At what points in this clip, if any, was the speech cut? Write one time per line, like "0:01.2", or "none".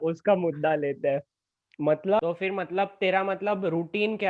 0:02.2